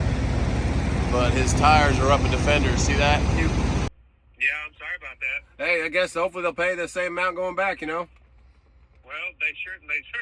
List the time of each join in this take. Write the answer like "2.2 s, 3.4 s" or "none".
3.9 s